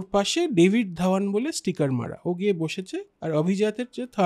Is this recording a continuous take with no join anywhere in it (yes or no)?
yes